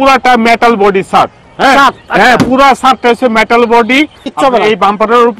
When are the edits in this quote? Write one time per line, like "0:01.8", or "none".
0:04.2